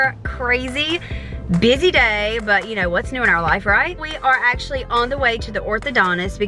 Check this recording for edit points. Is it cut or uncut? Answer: cut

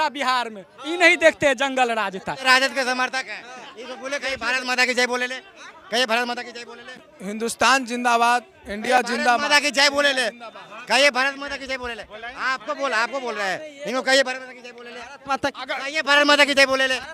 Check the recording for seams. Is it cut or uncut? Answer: cut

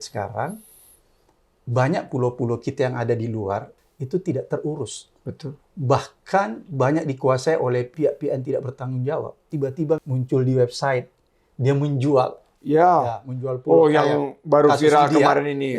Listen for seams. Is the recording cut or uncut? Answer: cut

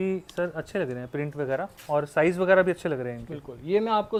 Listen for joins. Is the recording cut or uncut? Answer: uncut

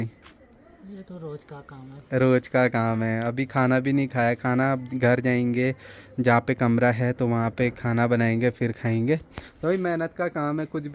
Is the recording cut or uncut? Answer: uncut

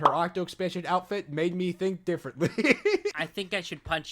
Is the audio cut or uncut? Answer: cut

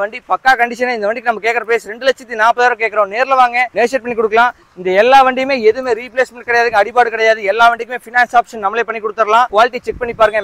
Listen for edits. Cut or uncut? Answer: uncut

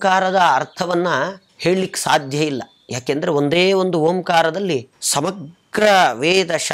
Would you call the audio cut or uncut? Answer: cut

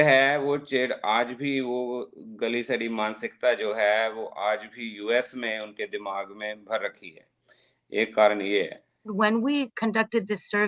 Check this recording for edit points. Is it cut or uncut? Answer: cut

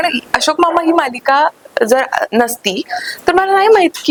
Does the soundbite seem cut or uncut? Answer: uncut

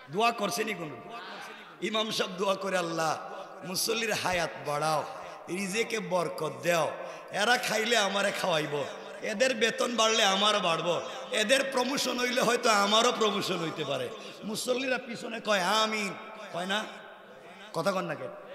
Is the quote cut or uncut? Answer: uncut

